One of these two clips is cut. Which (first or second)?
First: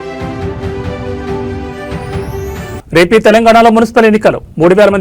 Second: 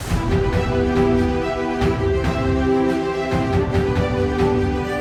first